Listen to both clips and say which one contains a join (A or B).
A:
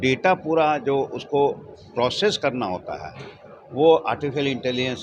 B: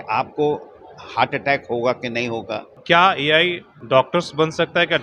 B